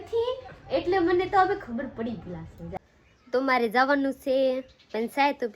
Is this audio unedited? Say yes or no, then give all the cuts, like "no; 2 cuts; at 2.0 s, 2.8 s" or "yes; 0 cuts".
no; 1 cut; at 2.8 s